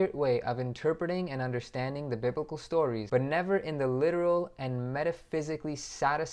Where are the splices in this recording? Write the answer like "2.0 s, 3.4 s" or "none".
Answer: 3.0 s